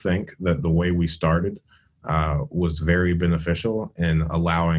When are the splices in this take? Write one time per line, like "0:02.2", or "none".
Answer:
none